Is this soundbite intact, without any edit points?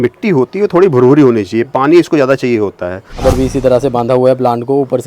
no; 1 cut; at 3.2 s

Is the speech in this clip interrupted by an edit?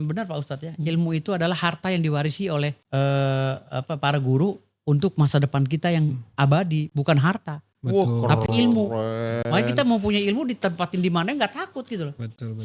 no; 0 cuts

